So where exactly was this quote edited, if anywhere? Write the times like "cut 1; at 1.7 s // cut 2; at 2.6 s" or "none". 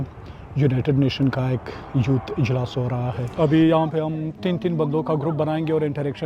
cut 1; at 3.2 s // cut 2; at 4.4 s